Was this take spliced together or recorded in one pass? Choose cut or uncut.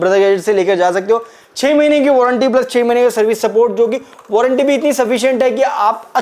uncut